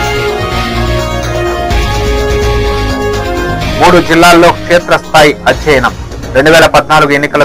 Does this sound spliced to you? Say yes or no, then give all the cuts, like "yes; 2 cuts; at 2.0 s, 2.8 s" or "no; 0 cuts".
yes; 1 cut; at 3.5 s